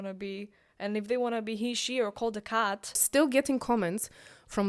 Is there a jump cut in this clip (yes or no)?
yes